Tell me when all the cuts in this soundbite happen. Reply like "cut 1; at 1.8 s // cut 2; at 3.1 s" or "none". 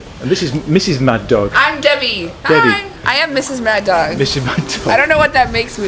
cut 1; at 3.1 s